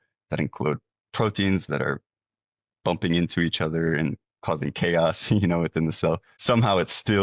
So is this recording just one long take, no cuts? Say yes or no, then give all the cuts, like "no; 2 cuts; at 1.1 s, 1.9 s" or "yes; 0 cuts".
yes; 0 cuts